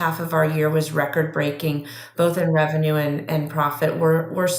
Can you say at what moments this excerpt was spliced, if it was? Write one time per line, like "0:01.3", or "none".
none